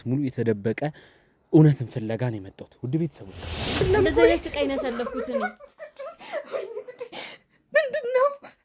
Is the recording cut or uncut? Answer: cut